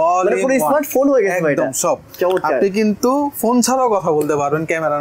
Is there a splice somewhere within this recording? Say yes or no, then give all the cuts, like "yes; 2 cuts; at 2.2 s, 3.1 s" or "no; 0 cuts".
no; 0 cuts